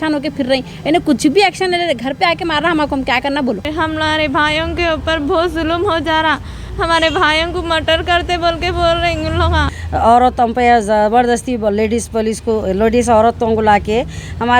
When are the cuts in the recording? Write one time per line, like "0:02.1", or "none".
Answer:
0:03.7
0:09.7